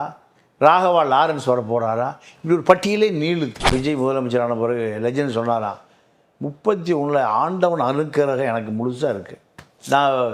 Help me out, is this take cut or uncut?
cut